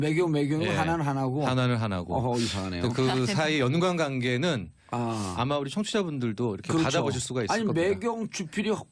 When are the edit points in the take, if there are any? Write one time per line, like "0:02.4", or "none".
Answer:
none